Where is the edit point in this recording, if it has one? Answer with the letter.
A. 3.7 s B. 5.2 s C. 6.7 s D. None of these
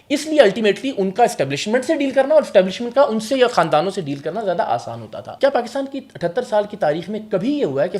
B